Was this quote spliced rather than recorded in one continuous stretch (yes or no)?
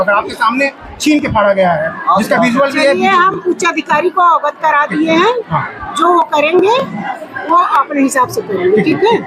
no